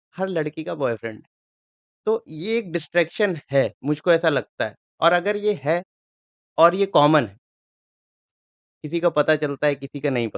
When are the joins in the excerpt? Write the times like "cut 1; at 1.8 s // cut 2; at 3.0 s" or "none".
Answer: none

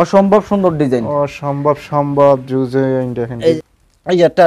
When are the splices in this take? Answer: cut 1; at 3.6 s

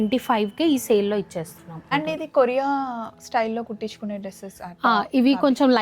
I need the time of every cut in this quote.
cut 1; at 1.9 s

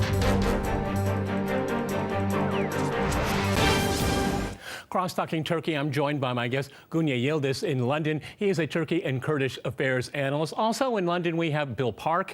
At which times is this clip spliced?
cut 1; at 8.7 s

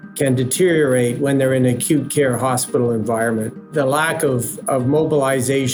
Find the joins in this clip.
cut 1; at 3.6 s

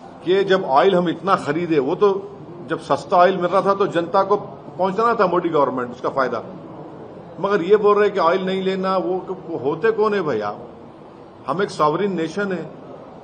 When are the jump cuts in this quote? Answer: none

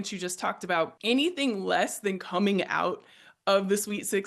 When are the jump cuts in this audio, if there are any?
cut 1; at 1.0 s

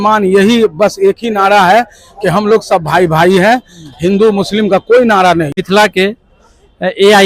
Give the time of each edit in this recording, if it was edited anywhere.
cut 1; at 5.6 s

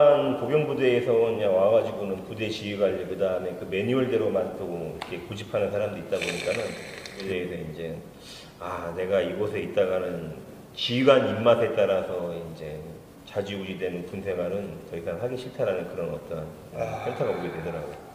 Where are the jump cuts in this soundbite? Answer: cut 1; at 7.1 s

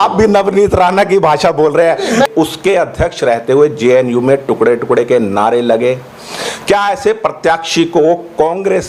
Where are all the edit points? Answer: cut 1; at 2.3 s

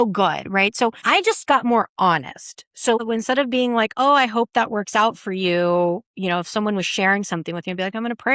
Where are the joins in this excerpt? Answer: cut 1; at 3.0 s

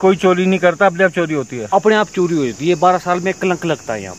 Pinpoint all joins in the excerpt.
none

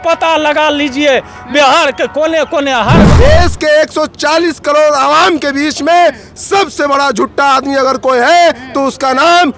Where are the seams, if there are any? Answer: cut 1; at 3.0 s

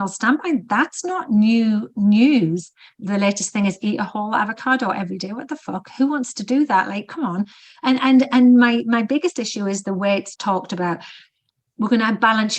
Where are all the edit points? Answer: cut 1; at 2.8 s // cut 2; at 10.3 s

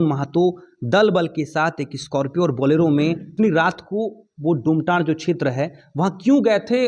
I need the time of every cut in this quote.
cut 1; at 3.3 s

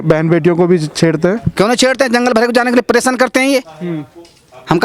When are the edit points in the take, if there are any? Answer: none

